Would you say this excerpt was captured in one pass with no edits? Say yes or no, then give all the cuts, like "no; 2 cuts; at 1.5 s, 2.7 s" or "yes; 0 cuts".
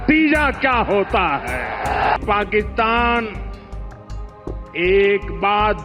no; 3 cuts; at 2.1 s, 3.4 s, 4.7 s